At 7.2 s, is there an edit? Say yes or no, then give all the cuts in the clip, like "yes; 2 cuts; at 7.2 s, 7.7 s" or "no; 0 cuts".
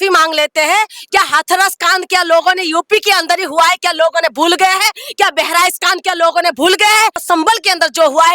yes; 1 cut; at 7.2 s